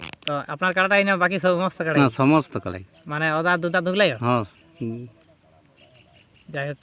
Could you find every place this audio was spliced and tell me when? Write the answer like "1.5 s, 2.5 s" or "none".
none